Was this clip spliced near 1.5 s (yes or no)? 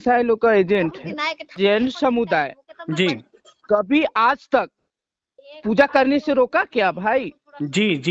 yes